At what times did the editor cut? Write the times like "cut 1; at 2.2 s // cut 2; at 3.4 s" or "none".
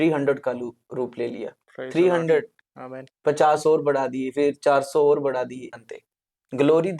cut 1; at 5.7 s

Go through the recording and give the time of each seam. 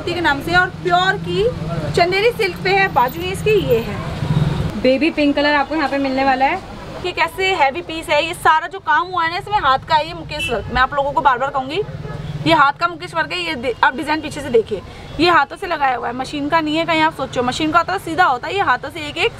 cut 1; at 4.6 s // cut 2; at 7.0 s

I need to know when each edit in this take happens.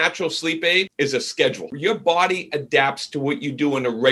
cut 1; at 0.9 s // cut 2; at 1.7 s

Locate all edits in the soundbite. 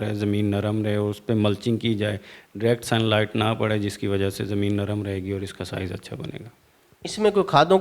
none

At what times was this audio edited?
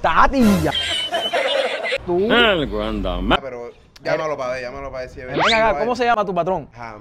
cut 1; at 2.0 s // cut 2; at 3.4 s

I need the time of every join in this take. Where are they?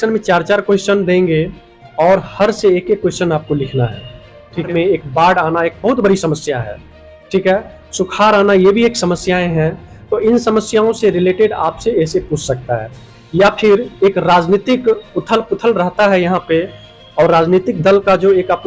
cut 1; at 4.7 s

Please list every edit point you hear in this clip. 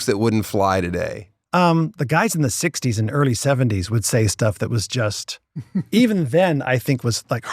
cut 1; at 1.3 s

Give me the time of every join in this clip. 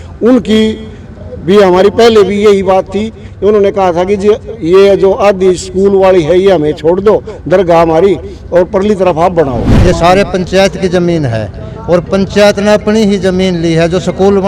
cut 1; at 9.7 s

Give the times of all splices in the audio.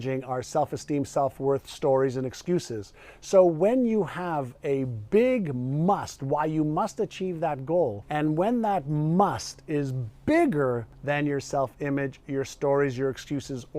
cut 1; at 8.0 s // cut 2; at 10.9 s

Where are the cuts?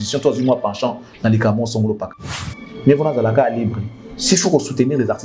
cut 1; at 2.5 s

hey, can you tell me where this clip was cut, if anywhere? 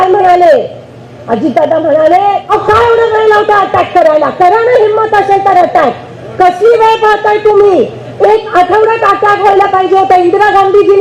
cut 1; at 2.5 s

